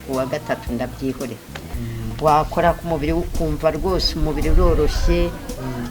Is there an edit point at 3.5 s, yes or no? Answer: no